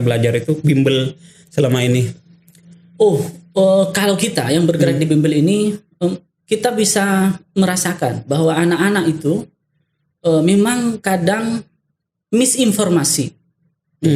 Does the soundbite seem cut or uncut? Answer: uncut